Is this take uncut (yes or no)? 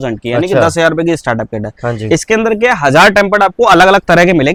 yes